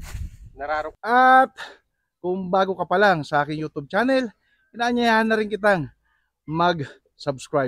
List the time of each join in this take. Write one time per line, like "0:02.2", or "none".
0:00.9